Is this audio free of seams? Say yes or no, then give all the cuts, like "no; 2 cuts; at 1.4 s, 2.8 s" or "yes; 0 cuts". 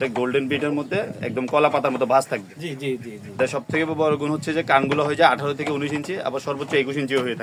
yes; 0 cuts